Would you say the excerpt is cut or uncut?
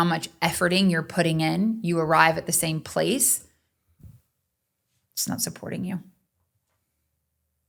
uncut